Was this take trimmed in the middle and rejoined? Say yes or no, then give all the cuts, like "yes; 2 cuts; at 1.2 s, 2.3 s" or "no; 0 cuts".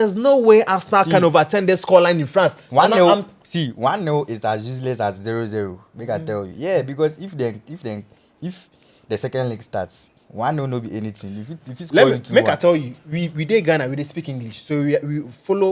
no; 0 cuts